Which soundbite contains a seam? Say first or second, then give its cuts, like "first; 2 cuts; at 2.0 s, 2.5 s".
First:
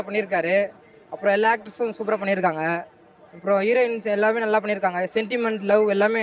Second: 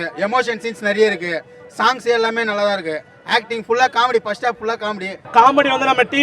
second; 1 cut; at 5.1 s